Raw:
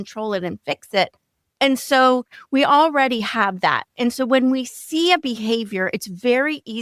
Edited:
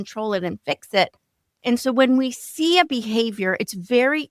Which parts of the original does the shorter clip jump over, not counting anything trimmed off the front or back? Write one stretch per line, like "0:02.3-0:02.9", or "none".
0:01.5-0:03.8